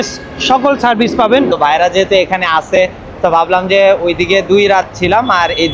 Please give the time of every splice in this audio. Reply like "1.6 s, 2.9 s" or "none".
1.5 s